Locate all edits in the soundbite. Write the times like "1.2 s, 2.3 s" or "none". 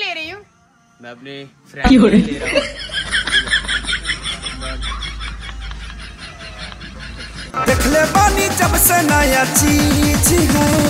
none